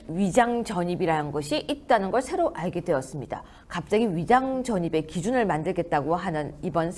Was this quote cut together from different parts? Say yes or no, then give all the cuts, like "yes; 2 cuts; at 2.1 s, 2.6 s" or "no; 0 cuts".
no; 0 cuts